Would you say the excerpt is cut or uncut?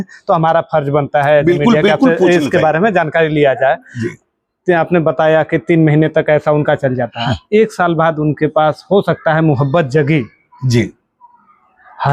uncut